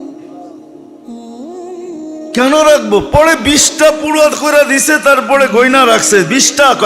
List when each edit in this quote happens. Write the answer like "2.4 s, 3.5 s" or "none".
2.3 s